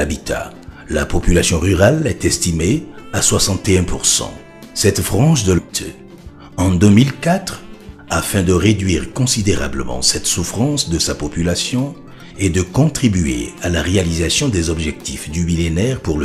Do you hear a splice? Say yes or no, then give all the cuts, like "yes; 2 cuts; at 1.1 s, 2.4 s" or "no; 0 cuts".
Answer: no; 0 cuts